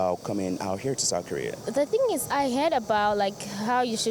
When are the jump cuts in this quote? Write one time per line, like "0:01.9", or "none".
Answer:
none